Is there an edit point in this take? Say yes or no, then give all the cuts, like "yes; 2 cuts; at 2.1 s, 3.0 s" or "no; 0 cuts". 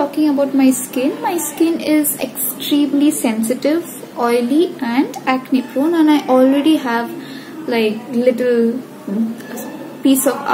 no; 0 cuts